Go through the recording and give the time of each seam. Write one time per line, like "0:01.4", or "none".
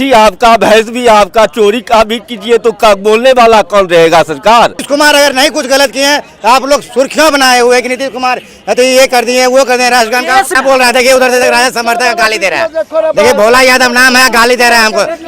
0:04.8
0:10.6